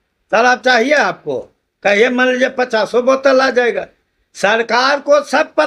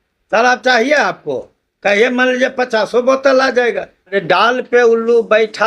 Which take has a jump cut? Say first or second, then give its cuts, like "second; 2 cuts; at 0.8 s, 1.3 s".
second; 1 cut; at 4.2 s